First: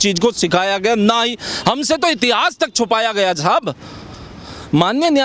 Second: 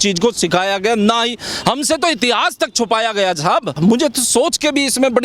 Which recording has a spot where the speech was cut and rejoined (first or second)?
second